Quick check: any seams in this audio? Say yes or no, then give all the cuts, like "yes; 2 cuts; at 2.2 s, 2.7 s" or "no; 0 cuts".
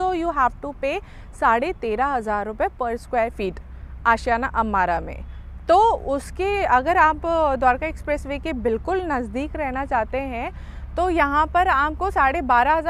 no; 0 cuts